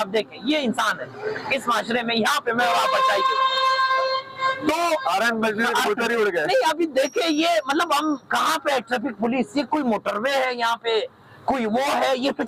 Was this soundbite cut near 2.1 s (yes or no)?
no